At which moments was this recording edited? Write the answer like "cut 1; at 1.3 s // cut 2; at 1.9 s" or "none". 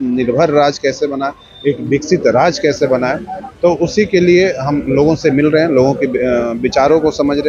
none